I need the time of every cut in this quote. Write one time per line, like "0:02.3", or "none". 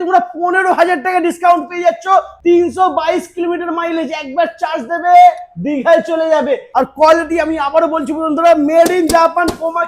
0:02.3
0:06.7